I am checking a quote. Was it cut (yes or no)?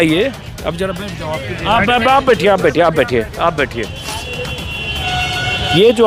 no